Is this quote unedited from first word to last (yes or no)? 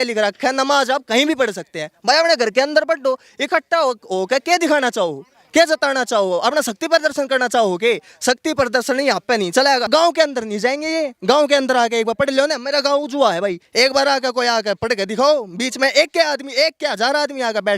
no